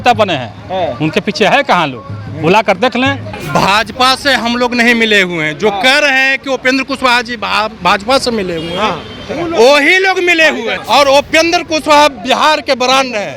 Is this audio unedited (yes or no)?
no